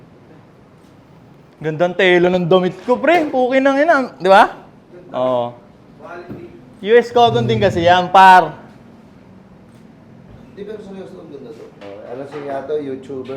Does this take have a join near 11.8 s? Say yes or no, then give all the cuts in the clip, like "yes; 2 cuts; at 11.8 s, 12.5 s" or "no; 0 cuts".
yes; 1 cut; at 11.8 s